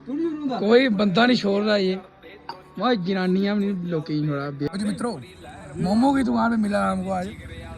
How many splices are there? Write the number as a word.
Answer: one